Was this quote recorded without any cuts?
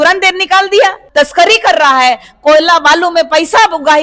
no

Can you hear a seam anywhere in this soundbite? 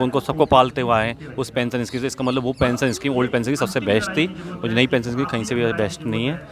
no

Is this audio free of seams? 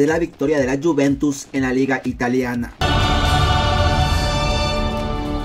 no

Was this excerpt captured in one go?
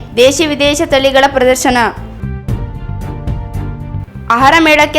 no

